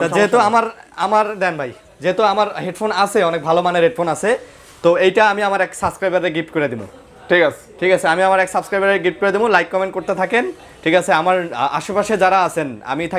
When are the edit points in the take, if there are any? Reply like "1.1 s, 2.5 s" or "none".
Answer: none